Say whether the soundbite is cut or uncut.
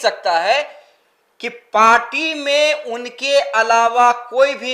uncut